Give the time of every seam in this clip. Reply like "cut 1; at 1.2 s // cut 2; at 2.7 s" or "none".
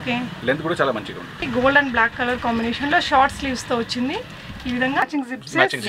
cut 1; at 1.4 s // cut 2; at 5.1 s